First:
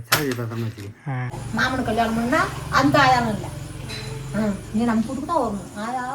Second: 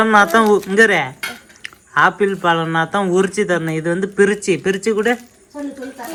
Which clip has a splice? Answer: first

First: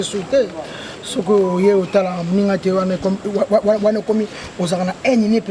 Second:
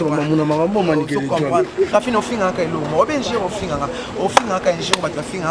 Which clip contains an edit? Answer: second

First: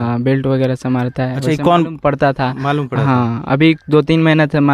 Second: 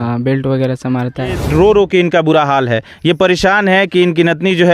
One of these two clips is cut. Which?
second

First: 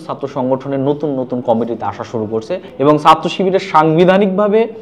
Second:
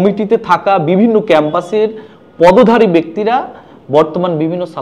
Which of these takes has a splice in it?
first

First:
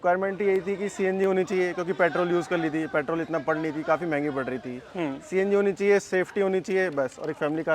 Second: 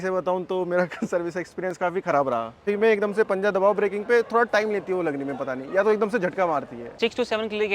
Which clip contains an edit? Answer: second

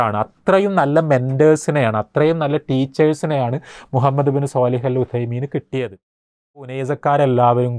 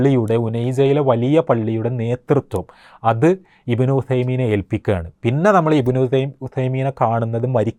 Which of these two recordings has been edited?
first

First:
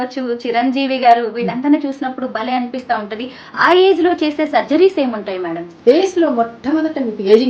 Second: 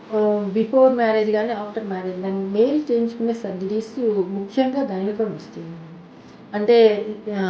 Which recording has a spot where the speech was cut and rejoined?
first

